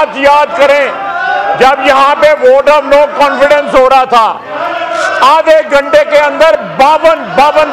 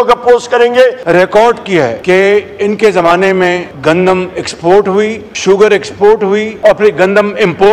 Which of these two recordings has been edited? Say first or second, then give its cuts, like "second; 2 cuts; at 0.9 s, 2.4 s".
second; 5 cuts; at 1.0 s, 2.0 s, 3.7 s, 5.3 s, 6.5 s